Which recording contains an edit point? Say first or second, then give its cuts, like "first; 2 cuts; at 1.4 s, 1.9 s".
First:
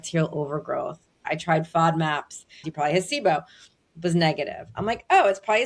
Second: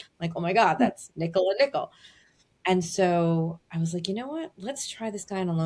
first; 2 cuts; at 1.2 s, 2.7 s